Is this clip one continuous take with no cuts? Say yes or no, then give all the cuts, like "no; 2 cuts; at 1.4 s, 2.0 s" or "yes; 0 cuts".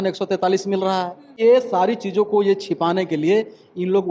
no; 1 cut; at 1.4 s